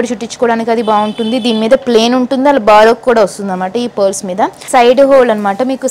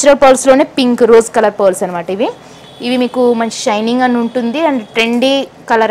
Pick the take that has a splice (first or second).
first